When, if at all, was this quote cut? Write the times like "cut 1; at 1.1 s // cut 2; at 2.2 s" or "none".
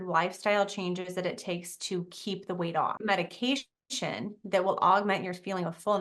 cut 1; at 3.0 s